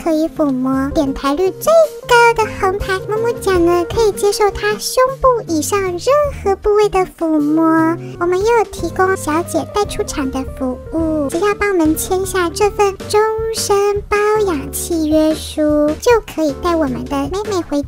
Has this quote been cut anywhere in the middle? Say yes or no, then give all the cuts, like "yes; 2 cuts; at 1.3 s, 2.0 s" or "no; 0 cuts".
yes; 7 cuts; at 0.9 s, 3.0 s, 8.1 s, 9.2 s, 11.3 s, 13.0 s, 16.0 s